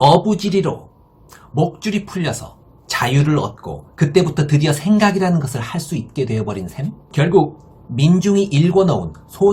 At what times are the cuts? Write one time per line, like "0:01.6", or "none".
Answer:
0:07.0